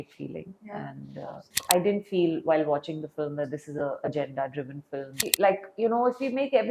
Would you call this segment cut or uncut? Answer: cut